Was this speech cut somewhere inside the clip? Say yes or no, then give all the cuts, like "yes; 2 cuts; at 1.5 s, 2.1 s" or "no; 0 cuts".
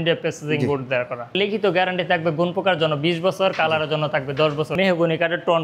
yes; 2 cuts; at 1.4 s, 4.7 s